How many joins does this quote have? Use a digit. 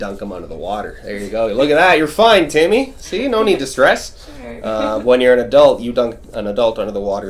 0